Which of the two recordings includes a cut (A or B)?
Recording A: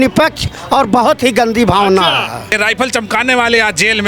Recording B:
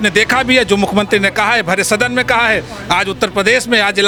A